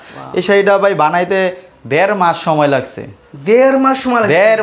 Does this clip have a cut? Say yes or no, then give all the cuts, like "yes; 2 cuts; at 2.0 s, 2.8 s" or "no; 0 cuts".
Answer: no; 0 cuts